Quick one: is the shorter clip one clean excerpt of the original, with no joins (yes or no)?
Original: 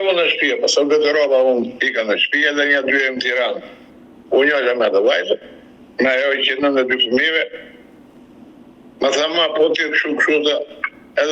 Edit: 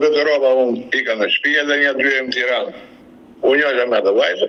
yes